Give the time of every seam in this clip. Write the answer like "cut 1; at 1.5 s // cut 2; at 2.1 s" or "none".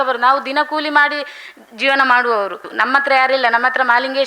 cut 1; at 2.7 s